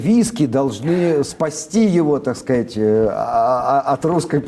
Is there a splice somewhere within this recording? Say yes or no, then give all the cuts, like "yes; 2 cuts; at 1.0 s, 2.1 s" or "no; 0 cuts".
no; 0 cuts